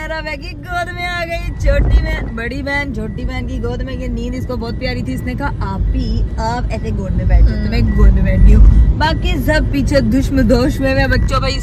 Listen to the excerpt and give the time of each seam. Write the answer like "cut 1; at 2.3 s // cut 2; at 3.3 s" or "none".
none